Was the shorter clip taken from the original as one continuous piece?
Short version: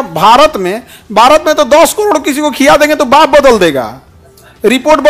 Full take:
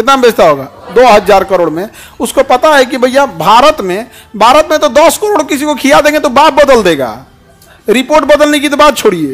yes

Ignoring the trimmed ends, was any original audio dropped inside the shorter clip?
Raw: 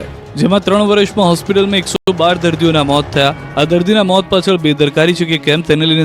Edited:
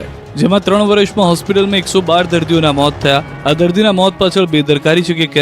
yes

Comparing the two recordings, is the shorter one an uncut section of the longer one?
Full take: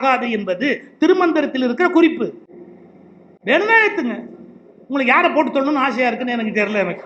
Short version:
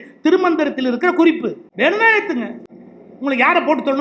no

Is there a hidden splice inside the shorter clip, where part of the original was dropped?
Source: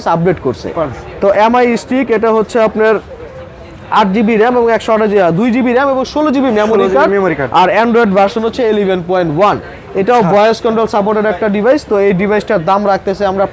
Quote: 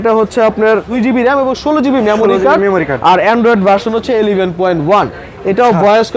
yes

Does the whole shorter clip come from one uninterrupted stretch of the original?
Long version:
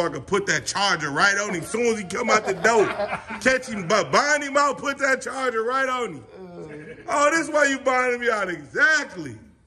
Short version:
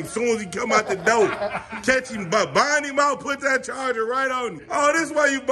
no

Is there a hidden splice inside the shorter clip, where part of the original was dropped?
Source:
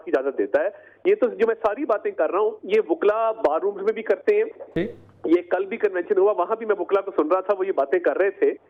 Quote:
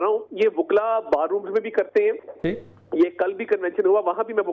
no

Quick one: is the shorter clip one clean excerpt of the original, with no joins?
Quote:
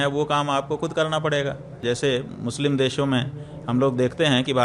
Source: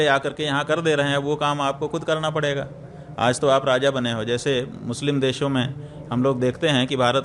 no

